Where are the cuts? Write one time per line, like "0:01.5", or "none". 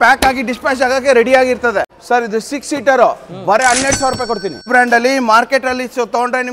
0:02.0
0:04.7

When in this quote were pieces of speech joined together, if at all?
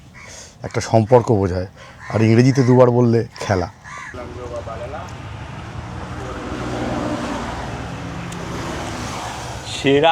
0:04.1

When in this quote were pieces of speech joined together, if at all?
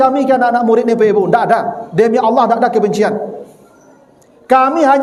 none

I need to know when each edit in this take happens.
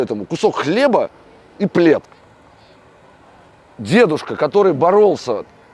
0:02.2

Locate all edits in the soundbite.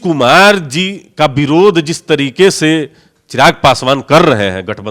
none

